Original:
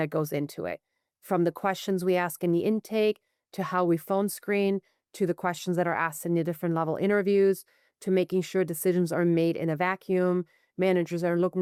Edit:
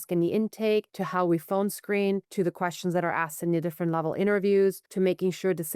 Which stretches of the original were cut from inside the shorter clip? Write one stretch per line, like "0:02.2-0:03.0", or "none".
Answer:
0:03.3-0:03.6
0:04.9-0:05.1
0:07.7-0:08.0

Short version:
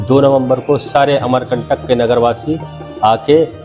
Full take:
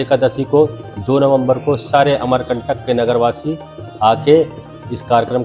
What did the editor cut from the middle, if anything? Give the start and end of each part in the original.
none

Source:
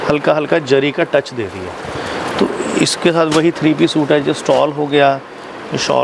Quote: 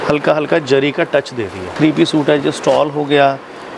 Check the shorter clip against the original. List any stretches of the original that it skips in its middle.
0:01.7-0:03.6

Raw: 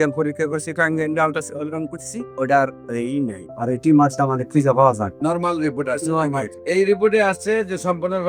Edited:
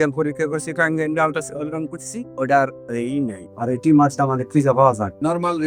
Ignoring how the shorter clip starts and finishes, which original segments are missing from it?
none

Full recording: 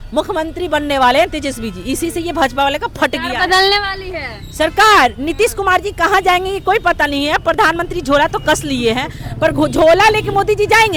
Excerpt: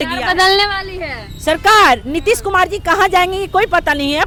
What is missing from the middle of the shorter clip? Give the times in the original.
none

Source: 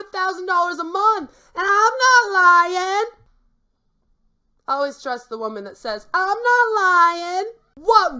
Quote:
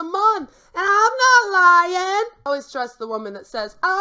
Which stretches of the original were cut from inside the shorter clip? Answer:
0:03.3-0:04.8

